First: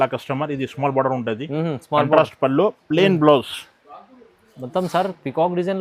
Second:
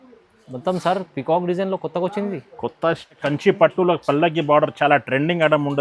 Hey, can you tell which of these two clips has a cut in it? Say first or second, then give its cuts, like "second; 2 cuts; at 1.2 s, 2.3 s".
second; 1 cut; at 3.2 s